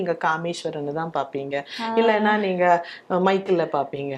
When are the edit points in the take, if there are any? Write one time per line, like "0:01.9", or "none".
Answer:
none